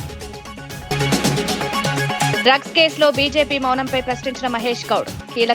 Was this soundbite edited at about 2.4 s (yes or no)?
yes